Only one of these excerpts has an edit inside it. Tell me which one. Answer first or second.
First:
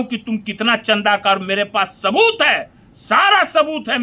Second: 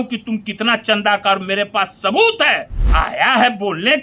second